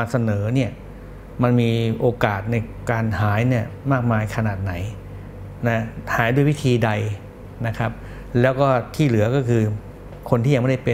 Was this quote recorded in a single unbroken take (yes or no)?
yes